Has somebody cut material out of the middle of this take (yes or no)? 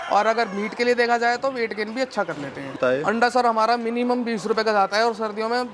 yes